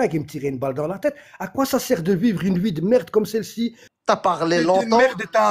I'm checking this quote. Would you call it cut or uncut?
cut